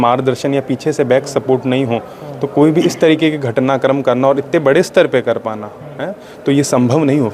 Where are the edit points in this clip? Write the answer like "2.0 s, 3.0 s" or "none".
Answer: none